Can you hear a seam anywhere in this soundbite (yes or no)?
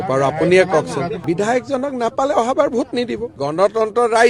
yes